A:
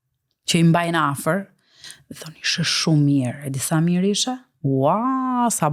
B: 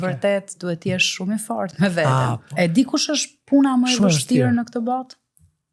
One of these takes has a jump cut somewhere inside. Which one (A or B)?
B